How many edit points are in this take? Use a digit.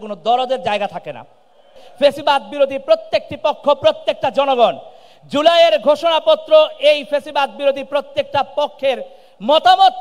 1